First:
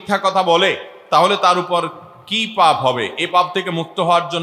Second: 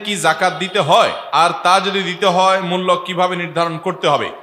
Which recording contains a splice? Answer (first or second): second